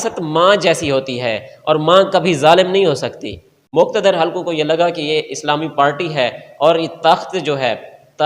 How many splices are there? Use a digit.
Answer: 1